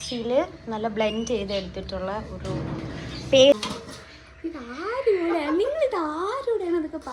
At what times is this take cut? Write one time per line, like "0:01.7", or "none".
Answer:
0:03.5